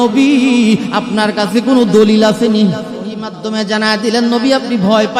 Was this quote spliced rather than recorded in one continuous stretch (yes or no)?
yes